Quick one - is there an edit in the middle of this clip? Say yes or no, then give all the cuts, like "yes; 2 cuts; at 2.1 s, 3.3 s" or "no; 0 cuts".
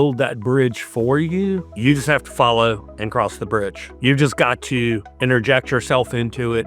no; 0 cuts